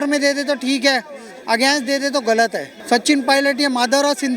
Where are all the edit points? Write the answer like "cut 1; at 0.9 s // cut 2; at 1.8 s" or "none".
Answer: cut 1; at 2.7 s